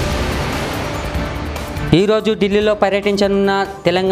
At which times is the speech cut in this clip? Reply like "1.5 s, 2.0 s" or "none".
none